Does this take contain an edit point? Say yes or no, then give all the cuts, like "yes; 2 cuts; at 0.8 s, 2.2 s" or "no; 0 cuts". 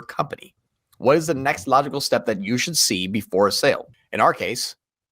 yes; 1 cut; at 4.0 s